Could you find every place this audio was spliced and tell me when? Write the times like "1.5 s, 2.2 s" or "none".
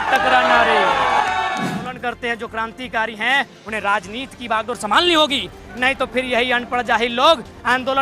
1.7 s